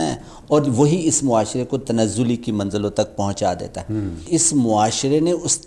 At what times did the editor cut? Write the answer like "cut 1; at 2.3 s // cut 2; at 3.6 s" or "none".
cut 1; at 4.2 s